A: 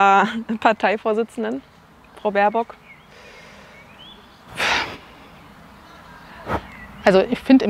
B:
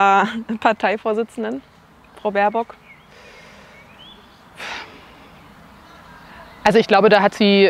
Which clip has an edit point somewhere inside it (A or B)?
A